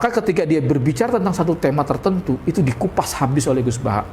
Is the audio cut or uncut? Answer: uncut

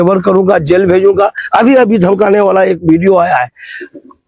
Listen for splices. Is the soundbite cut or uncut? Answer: uncut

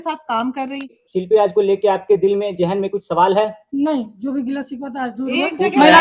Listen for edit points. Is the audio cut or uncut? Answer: cut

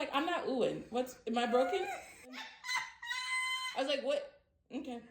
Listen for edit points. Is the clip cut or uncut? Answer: cut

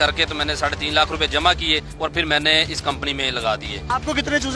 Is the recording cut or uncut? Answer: uncut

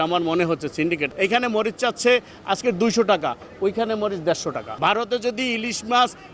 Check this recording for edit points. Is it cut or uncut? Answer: cut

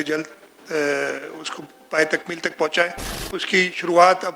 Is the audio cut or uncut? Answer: uncut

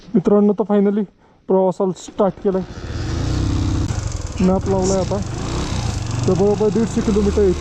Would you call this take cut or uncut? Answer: cut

